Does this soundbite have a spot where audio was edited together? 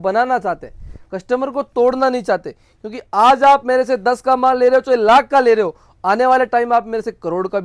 no; 0 cuts

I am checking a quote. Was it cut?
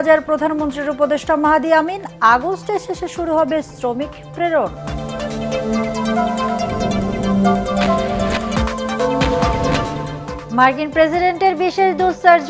no; 0 cuts

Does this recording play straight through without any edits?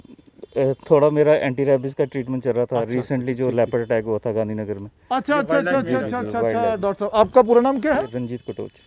yes; 0 cuts

